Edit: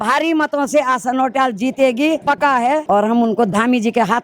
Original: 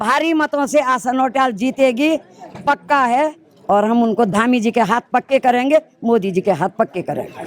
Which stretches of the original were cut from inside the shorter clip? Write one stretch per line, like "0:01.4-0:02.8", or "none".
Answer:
0:02.6-0:03.4